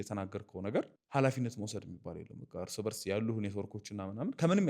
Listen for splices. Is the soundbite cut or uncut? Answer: cut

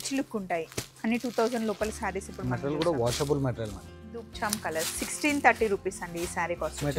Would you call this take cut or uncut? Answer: cut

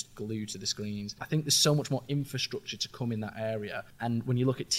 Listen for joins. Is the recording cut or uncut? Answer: cut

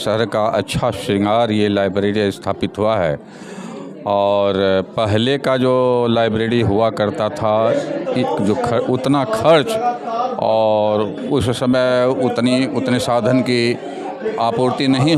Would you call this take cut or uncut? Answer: uncut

